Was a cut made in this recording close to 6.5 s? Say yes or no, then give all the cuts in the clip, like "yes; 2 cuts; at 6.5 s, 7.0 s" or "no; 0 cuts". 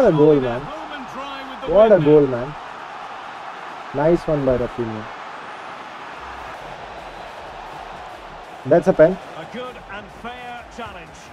yes; 1 cut; at 6.5 s